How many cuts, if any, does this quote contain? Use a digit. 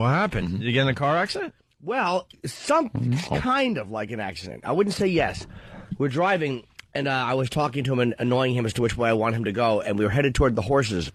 0